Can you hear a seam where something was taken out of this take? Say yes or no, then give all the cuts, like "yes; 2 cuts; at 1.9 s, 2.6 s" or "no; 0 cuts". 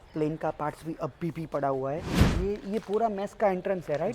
yes; 1 cut; at 2.3 s